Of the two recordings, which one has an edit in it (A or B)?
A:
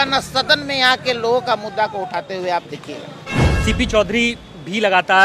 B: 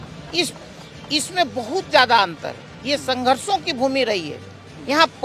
A